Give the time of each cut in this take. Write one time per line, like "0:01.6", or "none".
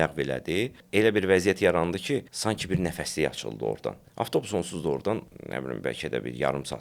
0:00.8
0:02.3
0:04.0
0:05.4